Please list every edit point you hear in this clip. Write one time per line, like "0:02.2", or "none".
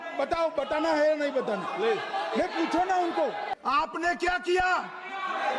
0:03.5

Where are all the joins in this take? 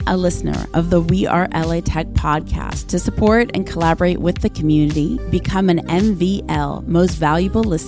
none

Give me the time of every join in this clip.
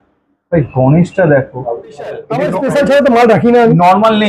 0:02.3

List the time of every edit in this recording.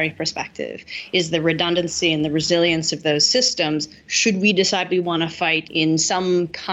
0:05.7

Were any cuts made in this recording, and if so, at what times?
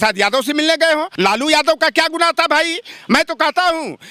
0:01.1

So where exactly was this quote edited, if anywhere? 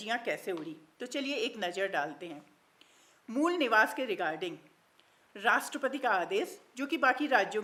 none

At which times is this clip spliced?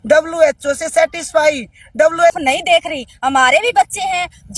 0:02.4

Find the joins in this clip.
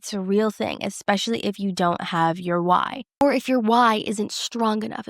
0:03.2

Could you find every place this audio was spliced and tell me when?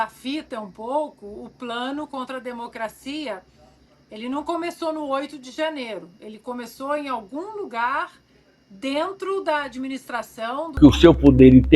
0:10.7

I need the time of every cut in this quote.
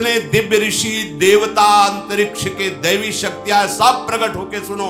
none

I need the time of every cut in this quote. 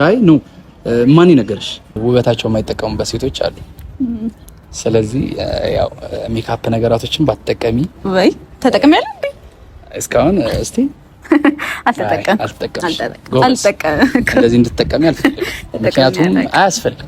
0:02.0

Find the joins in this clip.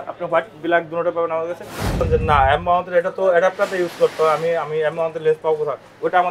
0:02.0

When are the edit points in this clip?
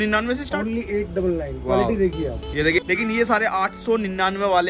0:02.9

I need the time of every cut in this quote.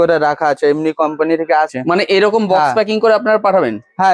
0:01.7

